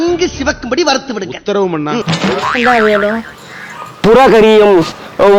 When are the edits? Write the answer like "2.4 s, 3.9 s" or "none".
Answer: none